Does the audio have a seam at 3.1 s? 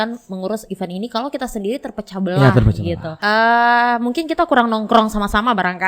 yes; 1 cut; at 3.1 s

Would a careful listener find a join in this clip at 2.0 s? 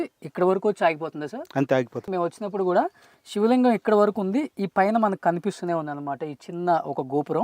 no; 0 cuts

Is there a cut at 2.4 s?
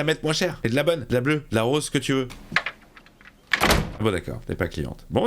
yes; 2 cuts; at 2.4 s, 3.9 s

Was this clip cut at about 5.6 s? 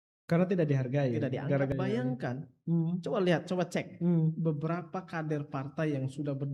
no; 1 cut; at 1.7 s

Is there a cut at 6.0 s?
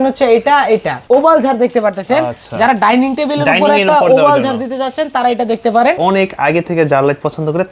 yes; 2 cuts; at 0.9 s, 6.0 s

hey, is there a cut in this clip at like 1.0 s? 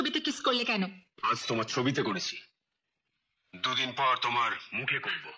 yes; 1 cut; at 1.0 s

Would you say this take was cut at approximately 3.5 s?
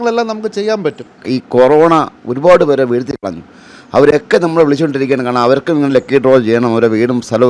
no; 1 cut; at 1.1 s

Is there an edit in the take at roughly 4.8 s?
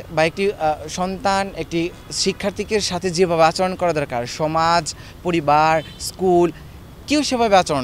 no; 0 cuts

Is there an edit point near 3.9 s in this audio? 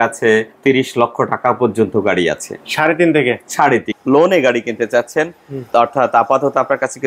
yes; 1 cut; at 3.9 s

